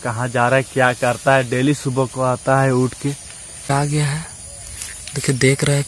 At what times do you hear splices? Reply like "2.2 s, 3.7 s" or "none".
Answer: 3.7 s